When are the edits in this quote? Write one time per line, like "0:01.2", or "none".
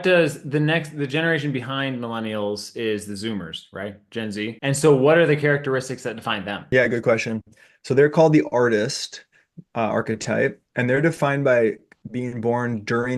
0:04.6
0:06.6